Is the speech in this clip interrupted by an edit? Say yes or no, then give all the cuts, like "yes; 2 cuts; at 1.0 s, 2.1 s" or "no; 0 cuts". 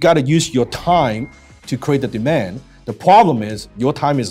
no; 0 cuts